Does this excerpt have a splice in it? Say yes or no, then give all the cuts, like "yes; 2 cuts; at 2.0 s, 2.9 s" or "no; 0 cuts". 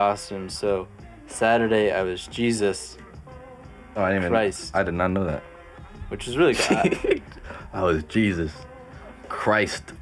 no; 0 cuts